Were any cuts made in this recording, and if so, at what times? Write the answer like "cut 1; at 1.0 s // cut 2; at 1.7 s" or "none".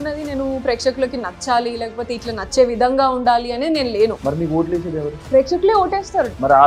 none